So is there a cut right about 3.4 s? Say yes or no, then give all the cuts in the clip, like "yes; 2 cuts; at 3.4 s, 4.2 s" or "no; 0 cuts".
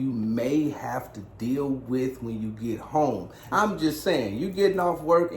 yes; 1 cut; at 3.4 s